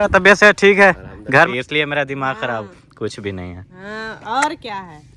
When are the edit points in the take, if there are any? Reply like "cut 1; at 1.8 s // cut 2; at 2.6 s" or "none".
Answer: cut 1; at 1.5 s

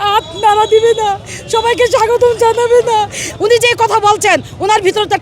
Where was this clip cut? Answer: cut 1; at 3.2 s

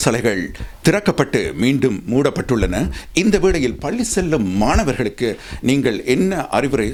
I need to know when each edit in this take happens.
none

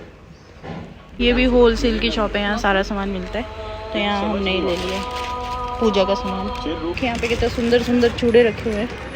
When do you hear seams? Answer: cut 1; at 1.1 s // cut 2; at 7.0 s

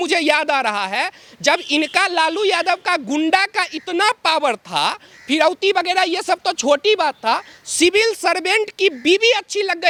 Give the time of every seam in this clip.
none

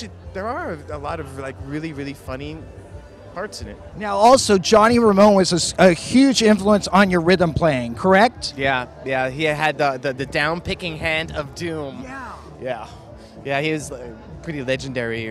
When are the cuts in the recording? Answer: cut 1; at 13.9 s

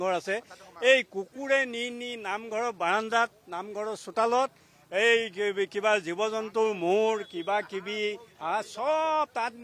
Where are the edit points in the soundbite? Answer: none

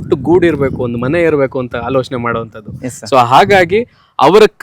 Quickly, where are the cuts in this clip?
none

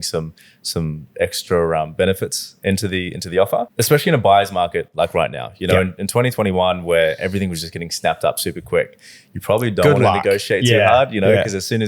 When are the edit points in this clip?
cut 1; at 3.7 s

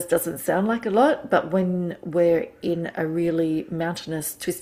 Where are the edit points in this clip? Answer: none

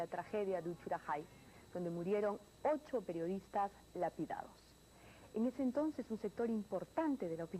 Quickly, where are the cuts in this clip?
none

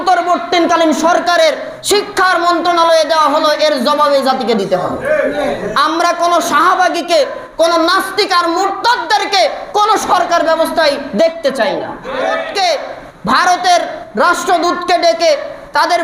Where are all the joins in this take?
cut 1; at 12.4 s

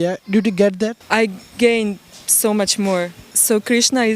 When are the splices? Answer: cut 1; at 1.0 s // cut 2; at 3.3 s

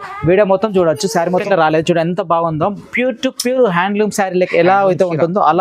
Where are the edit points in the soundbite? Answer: cut 1; at 1.4 s

